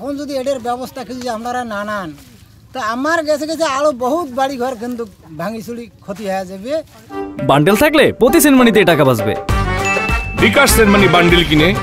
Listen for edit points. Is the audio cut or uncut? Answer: uncut